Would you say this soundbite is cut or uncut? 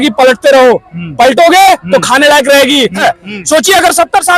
cut